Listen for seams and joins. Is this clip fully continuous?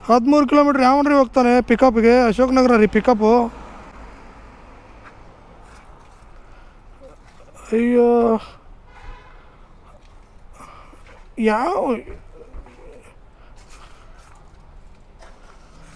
yes; 0 cuts

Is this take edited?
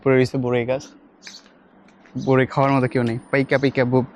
no; 0 cuts

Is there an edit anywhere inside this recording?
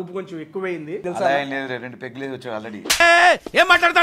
yes; 1 cut; at 1.0 s

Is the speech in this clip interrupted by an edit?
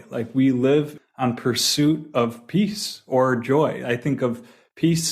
yes; 1 cut; at 1.0 s

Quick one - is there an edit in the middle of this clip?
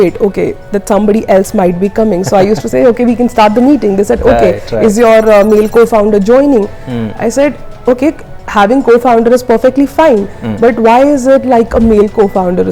no; 0 cuts

